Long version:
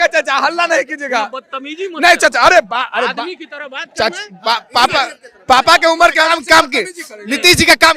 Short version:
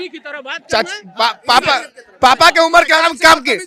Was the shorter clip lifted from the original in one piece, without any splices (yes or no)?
yes